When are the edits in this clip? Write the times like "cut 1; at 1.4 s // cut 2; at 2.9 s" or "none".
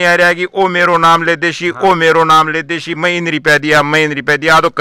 none